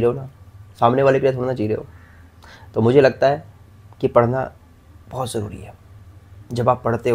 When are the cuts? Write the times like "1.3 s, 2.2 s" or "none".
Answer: none